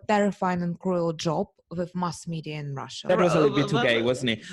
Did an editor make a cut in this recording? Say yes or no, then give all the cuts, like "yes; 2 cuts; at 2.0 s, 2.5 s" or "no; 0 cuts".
yes; 1 cut; at 3.1 s